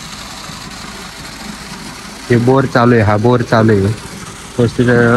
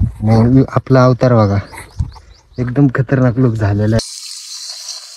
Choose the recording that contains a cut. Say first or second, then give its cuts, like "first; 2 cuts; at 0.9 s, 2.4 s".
second; 1 cut; at 4.0 s